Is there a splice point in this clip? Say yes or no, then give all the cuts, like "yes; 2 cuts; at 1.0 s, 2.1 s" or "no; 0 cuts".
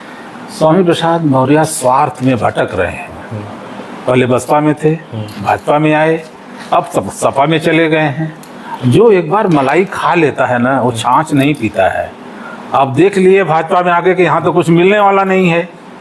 yes; 1 cut; at 1.7 s